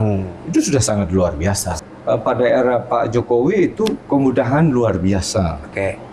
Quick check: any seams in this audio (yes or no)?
yes